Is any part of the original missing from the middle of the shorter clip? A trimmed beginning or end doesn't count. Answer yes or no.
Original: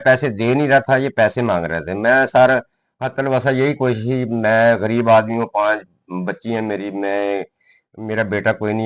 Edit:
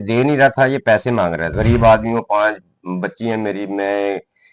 yes